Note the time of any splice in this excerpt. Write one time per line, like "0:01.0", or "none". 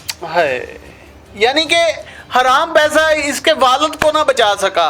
none